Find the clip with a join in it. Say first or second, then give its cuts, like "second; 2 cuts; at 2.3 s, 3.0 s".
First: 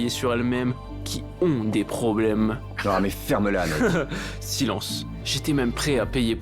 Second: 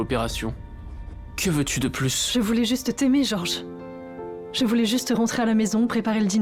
first; 1 cut; at 5.2 s